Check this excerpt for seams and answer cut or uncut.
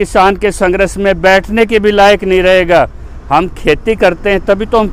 uncut